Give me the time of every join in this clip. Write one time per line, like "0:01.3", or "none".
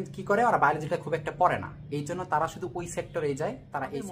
none